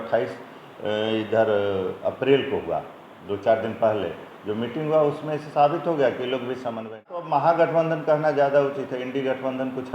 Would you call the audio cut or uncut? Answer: cut